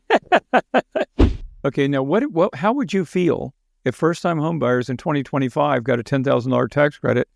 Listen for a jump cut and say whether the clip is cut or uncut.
cut